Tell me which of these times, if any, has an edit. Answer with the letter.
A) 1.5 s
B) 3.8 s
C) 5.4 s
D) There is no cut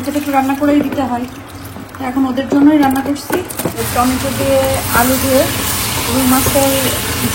B